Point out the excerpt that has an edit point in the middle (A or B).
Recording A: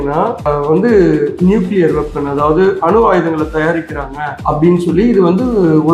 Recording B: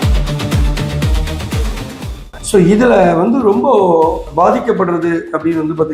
B